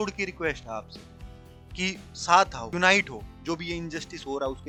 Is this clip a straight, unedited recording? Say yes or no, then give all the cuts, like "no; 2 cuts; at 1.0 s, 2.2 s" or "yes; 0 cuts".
yes; 0 cuts